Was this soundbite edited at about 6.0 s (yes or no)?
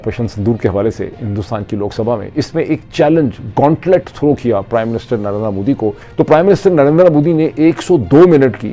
yes